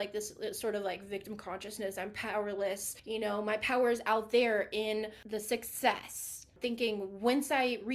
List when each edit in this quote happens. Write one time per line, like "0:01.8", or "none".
0:02.9
0:05.2
0:06.5